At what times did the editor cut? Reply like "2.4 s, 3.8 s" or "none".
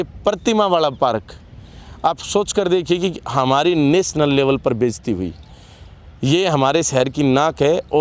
none